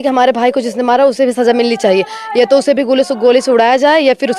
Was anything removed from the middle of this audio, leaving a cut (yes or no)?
no